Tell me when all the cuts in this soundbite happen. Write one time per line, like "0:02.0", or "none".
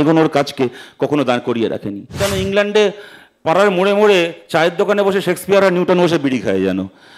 0:02.2